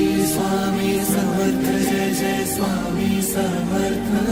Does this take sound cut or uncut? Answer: uncut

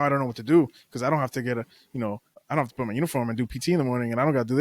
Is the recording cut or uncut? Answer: cut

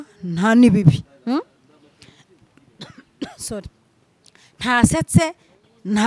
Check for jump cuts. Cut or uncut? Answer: uncut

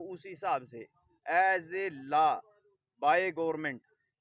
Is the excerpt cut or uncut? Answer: uncut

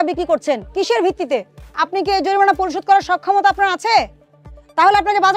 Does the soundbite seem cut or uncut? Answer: cut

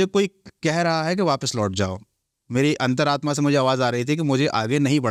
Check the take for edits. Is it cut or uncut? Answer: uncut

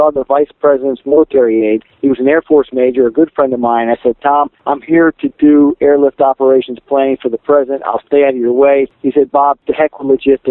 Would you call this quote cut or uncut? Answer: cut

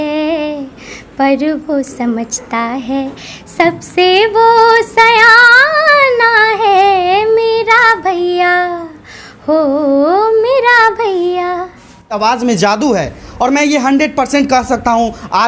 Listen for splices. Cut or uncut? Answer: cut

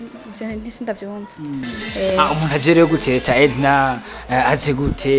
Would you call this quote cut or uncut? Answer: cut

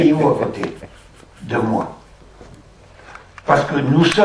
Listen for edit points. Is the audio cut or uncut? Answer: cut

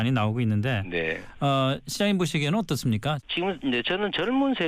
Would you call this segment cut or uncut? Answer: cut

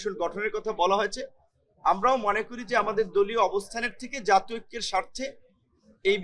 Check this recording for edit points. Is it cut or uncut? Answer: uncut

